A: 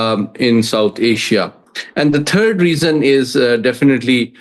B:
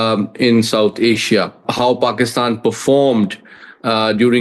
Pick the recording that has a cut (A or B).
B